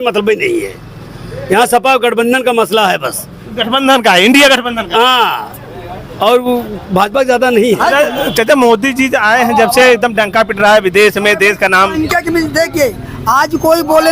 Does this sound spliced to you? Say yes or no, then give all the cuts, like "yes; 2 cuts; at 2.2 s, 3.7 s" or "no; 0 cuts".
yes; 1 cut; at 7.8 s